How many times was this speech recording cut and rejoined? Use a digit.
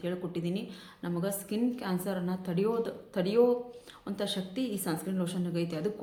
0